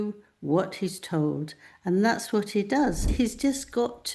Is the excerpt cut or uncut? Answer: cut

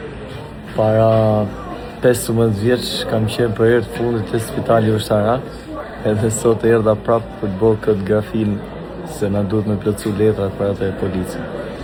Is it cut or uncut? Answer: uncut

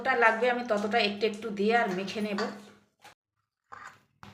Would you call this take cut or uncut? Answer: cut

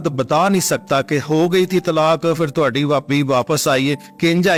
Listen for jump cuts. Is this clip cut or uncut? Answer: uncut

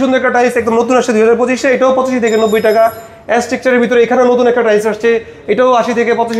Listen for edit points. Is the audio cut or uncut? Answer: uncut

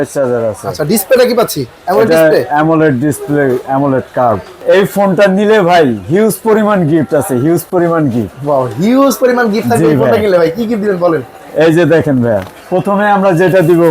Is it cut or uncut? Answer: cut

